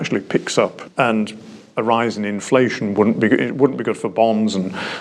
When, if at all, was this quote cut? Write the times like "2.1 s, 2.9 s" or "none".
none